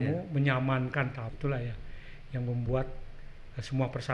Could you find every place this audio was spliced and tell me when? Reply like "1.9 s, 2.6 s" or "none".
1.3 s